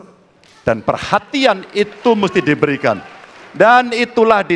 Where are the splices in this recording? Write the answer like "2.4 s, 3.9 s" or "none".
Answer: none